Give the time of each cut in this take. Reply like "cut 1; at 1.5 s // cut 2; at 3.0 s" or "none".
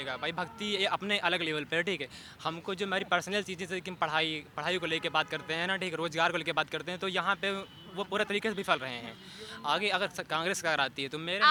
none